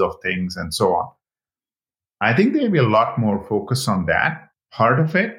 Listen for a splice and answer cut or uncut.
cut